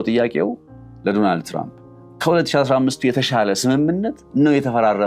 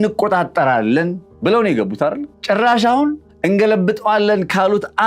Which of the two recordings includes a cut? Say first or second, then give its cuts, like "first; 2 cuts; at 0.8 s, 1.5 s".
second; 3 cuts; at 1.3 s, 2.3 s, 3.3 s